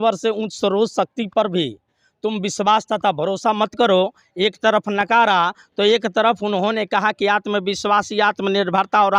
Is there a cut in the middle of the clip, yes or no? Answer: no